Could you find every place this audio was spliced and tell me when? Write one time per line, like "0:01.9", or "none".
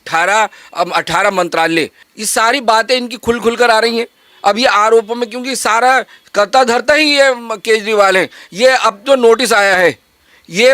0:02.0